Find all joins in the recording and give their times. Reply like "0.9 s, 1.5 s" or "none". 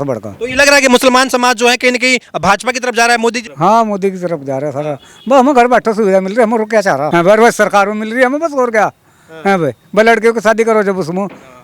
3.5 s, 7.1 s